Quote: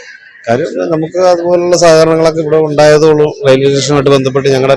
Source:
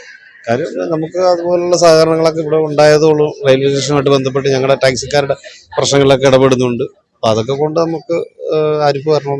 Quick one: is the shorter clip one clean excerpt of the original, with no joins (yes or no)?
yes